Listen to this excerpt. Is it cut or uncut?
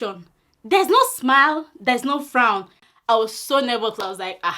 cut